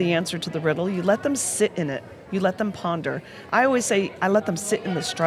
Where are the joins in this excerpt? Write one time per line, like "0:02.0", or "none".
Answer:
none